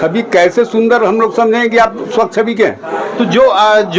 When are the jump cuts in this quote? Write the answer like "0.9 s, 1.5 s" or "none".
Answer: none